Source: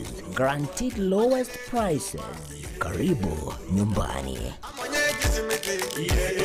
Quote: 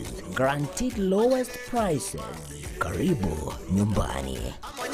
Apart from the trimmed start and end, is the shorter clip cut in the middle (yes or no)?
no